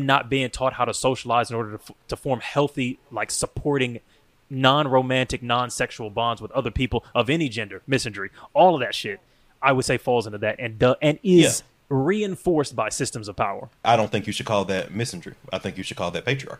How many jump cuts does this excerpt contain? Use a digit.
2